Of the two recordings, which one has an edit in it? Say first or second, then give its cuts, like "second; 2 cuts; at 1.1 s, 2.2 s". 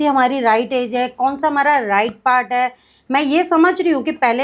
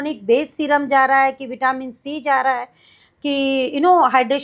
first; 1 cut; at 2.9 s